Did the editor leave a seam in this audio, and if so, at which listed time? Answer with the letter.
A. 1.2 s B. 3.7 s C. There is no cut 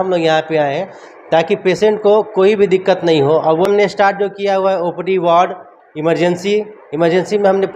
B